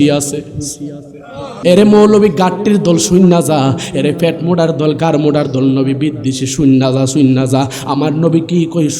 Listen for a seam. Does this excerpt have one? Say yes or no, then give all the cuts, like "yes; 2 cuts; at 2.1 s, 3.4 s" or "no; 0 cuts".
yes; 1 cut; at 1.5 s